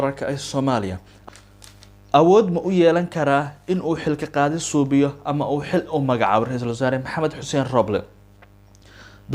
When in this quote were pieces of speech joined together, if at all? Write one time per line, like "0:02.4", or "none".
0:01.1